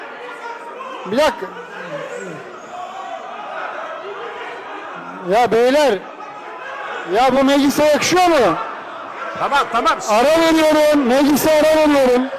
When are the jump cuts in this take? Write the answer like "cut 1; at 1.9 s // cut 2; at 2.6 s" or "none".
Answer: none